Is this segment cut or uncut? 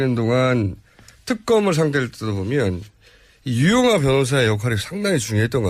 uncut